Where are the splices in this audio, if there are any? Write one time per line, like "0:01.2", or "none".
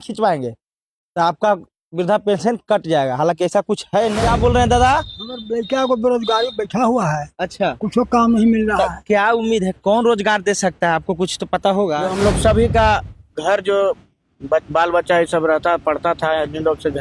0:04.1
0:12.1